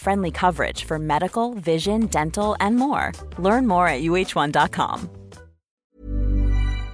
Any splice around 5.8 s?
yes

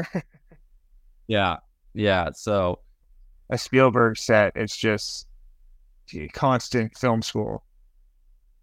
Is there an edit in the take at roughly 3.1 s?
yes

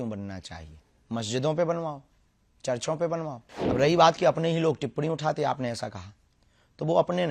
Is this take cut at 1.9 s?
no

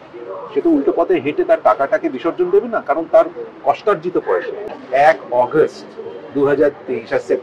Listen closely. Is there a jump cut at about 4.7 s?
yes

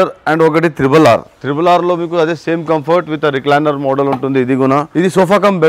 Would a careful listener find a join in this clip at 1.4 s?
yes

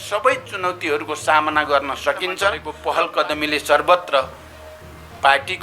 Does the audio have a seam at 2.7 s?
yes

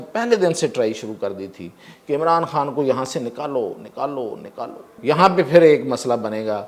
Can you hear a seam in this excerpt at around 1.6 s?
no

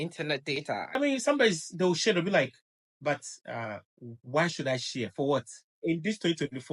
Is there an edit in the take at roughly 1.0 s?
yes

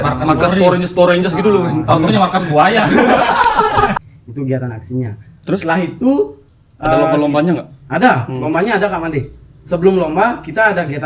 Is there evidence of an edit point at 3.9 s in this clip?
yes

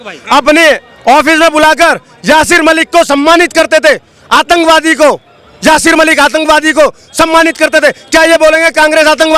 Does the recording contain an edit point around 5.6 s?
no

